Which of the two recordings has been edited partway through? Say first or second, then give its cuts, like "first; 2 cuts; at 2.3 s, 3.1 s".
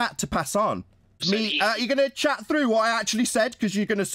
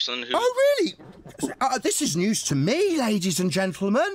first; 1 cut; at 1.2 s